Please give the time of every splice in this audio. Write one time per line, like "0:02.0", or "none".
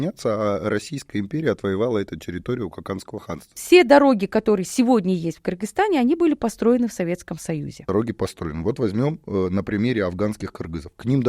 0:03.5
0:07.9